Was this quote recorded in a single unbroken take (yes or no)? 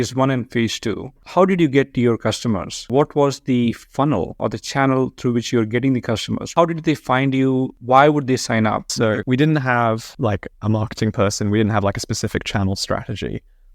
no